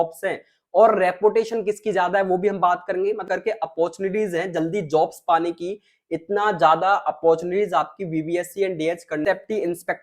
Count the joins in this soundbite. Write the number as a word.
two